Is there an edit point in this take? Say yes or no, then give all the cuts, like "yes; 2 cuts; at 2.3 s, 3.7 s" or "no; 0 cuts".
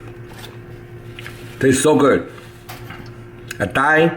yes; 1 cut; at 2.7 s